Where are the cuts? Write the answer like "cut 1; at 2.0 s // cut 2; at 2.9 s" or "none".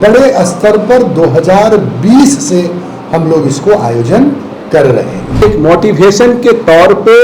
cut 1; at 5.4 s